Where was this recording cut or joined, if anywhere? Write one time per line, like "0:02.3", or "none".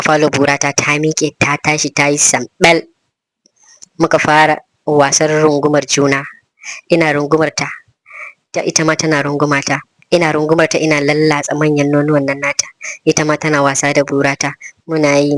0:09.9